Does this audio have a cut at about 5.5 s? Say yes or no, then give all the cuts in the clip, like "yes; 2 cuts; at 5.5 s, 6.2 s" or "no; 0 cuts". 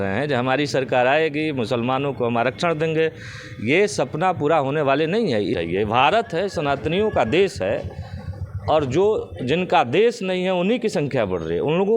yes; 1 cut; at 5.5 s